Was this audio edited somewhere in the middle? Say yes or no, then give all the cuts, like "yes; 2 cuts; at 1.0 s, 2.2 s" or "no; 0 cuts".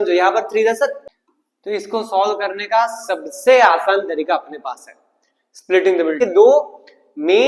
yes; 2 cuts; at 1.1 s, 6.2 s